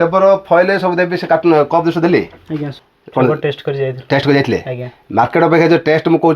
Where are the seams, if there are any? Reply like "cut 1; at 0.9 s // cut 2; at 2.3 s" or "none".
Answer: cut 1; at 2.7 s

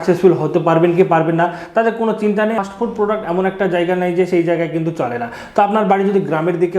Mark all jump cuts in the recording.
cut 1; at 2.6 s

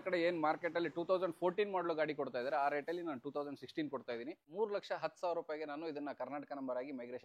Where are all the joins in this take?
cut 1; at 4.5 s

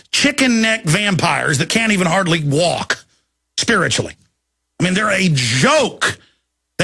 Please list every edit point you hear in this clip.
none

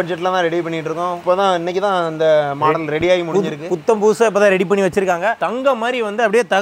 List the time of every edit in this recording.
none

